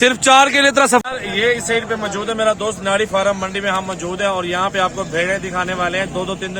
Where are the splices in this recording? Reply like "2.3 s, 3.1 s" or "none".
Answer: 1.0 s